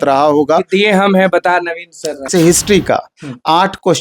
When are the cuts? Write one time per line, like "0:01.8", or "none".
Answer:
0:02.3